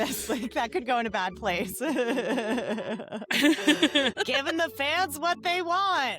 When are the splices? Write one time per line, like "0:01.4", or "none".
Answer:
0:04.1